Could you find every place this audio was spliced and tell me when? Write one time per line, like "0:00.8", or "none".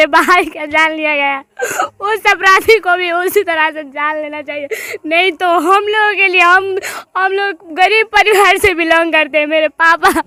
none